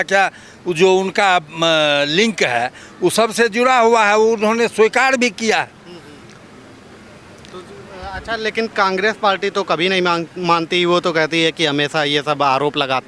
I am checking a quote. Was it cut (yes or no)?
no